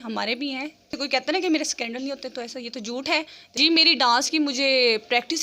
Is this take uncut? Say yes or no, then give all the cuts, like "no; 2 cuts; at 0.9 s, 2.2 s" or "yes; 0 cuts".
no; 2 cuts; at 0.9 s, 3.4 s